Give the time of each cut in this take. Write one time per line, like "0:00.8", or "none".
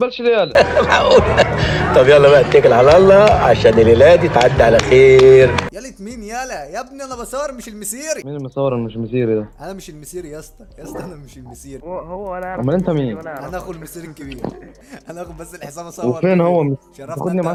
none

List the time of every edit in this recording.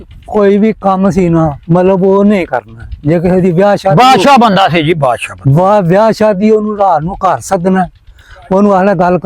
none

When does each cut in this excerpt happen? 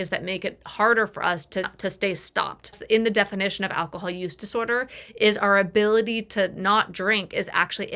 0:01.7
0:02.8

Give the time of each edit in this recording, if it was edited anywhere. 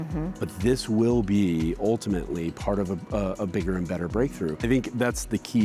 0:04.6

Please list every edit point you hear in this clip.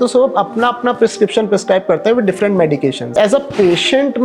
0:03.1

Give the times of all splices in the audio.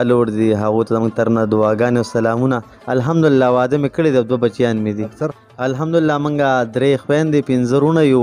0:02.7
0:05.2

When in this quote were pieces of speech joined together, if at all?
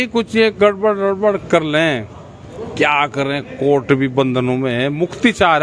none

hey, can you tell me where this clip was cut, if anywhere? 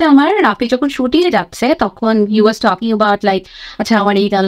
none

